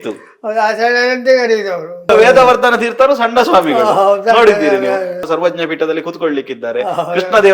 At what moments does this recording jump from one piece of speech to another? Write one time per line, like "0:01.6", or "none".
0:02.1
0:05.2